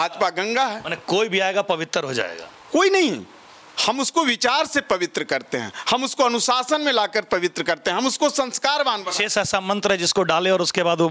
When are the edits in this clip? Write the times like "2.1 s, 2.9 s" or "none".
none